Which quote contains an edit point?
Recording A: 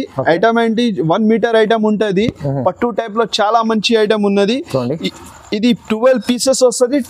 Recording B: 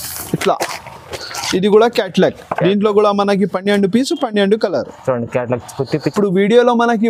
B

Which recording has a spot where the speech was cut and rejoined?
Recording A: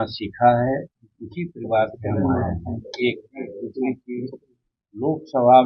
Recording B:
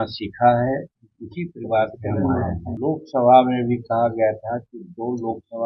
B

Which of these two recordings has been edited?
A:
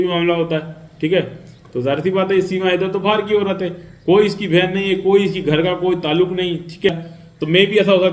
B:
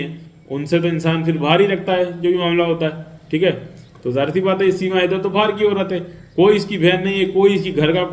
A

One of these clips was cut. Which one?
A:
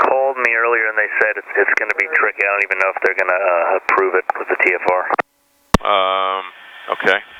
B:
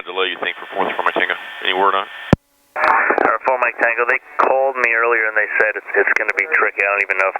B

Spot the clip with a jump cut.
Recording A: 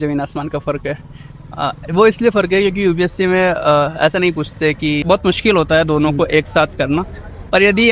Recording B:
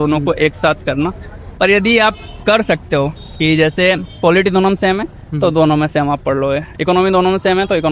A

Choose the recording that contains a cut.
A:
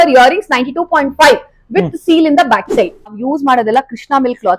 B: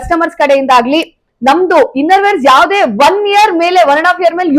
A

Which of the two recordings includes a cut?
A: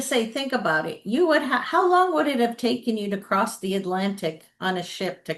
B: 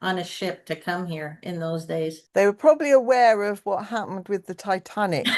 B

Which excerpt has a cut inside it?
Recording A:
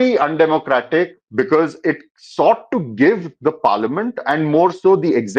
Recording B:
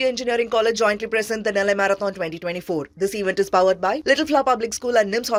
A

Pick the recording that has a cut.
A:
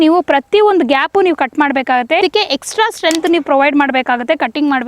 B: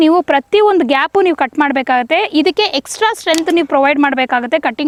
A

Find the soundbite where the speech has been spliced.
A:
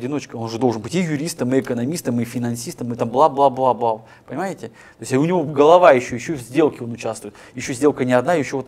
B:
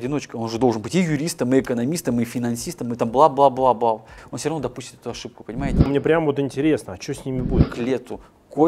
B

